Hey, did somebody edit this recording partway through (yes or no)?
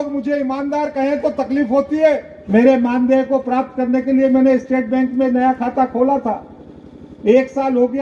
yes